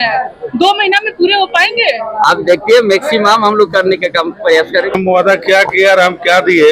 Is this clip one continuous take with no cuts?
no; 1 cut; at 4.9 s

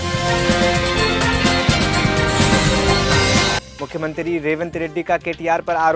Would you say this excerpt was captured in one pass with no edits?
yes; 0 cuts

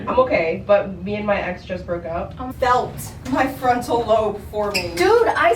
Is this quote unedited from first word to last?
no; 1 cut; at 2.4 s

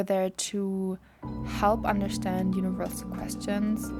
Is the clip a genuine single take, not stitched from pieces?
yes; 0 cuts

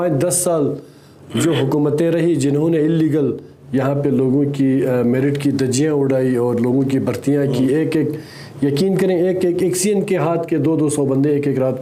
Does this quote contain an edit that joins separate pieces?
no; 0 cuts

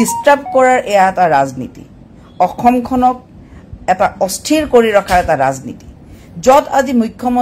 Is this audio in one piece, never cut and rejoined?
yes; 0 cuts

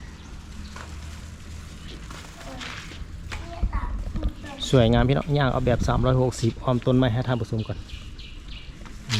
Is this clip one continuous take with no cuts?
yes; 0 cuts

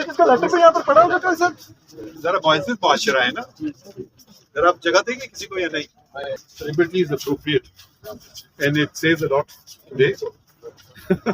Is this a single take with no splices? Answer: no; 2 cuts; at 2.0 s, 6.2 s

